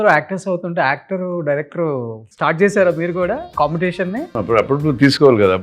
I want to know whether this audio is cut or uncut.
cut